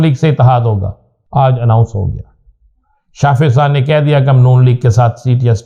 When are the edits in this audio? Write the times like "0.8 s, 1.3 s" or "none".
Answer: none